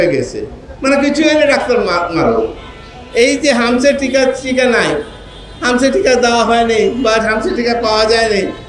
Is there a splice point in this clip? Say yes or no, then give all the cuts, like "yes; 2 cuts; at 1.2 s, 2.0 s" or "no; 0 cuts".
no; 0 cuts